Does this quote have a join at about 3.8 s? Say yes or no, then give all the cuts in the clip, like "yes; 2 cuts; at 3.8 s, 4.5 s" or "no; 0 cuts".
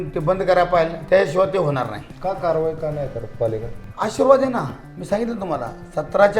yes; 2 cuts; at 1.0 s, 3.8 s